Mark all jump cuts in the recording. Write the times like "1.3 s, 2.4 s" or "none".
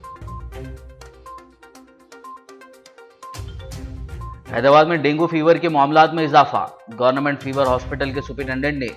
none